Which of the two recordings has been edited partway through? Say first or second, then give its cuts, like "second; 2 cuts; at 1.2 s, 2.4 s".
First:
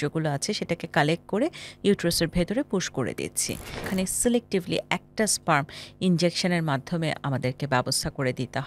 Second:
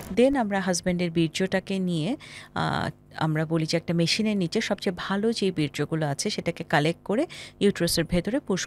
first; 1 cut; at 3.9 s